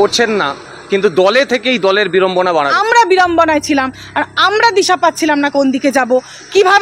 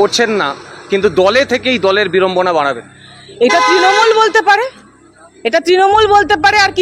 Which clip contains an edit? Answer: first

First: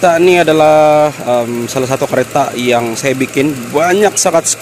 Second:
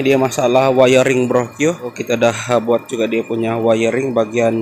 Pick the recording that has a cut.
second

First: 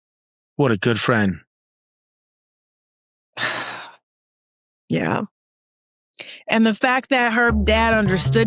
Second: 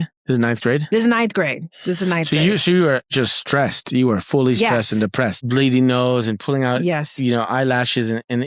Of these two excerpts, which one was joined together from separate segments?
second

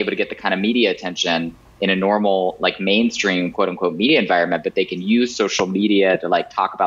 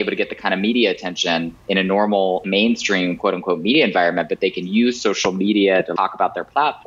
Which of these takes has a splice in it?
second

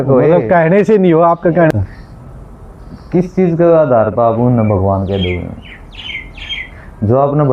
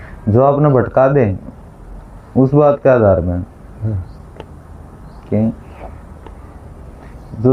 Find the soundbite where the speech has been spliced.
first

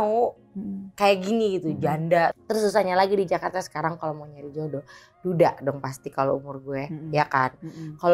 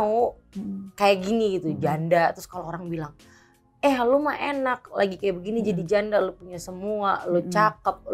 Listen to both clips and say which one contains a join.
first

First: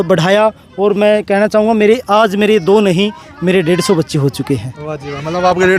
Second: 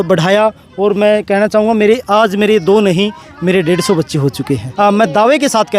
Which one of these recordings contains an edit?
second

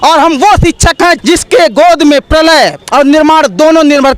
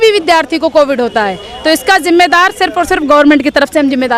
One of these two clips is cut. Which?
first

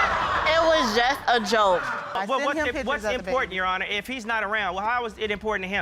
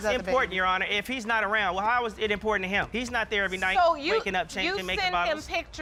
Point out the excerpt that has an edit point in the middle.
first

